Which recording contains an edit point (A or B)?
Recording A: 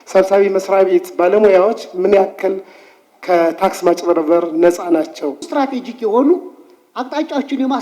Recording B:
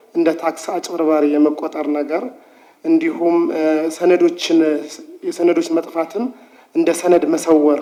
A